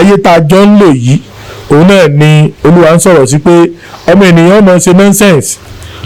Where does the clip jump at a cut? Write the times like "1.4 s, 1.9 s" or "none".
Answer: none